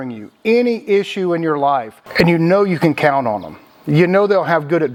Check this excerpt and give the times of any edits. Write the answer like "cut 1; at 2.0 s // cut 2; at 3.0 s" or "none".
none